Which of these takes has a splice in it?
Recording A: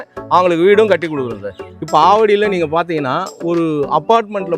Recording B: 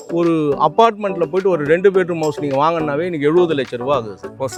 A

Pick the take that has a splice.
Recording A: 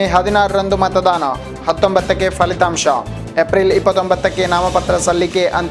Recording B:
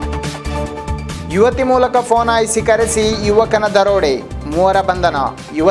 B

